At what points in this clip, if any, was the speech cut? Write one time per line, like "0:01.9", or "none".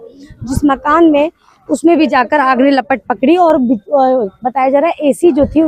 none